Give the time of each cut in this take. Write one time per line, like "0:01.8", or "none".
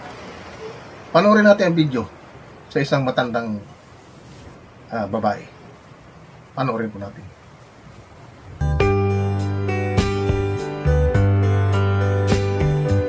0:08.7